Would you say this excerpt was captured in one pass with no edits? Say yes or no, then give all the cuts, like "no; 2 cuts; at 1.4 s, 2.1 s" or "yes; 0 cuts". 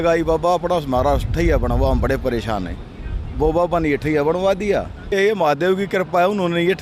no; 1 cut; at 5.1 s